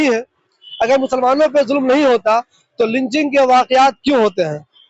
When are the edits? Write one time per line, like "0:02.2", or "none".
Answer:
none